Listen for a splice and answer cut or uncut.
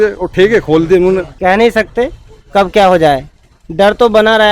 cut